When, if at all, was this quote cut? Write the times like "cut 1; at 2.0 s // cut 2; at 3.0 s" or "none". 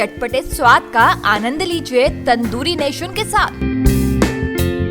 none